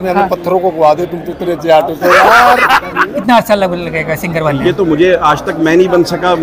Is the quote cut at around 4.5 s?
no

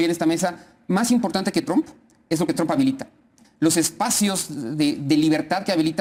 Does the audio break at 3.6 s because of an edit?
no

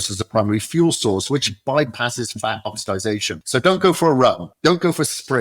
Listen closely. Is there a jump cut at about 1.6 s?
no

